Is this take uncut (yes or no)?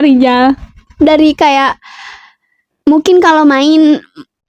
yes